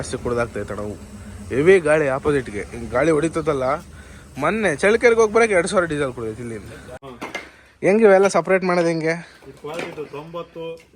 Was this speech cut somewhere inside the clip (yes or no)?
yes